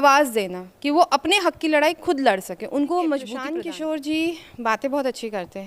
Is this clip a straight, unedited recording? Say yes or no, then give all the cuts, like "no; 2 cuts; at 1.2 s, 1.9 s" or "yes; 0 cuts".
no; 1 cut; at 3.5 s